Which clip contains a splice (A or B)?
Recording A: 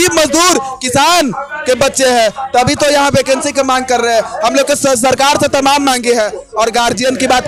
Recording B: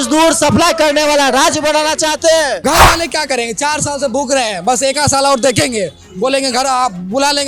B